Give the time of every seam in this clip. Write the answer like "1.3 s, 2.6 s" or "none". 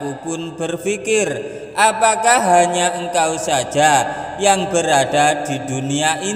none